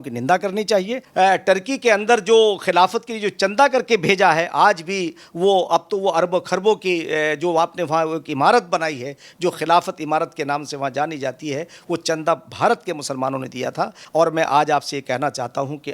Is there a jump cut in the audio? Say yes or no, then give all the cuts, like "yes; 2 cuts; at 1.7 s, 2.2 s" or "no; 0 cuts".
yes; 2 cuts; at 1.0 s, 14.0 s